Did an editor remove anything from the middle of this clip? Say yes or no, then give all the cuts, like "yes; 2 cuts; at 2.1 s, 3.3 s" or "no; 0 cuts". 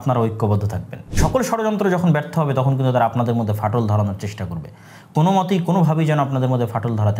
yes; 1 cut; at 1.1 s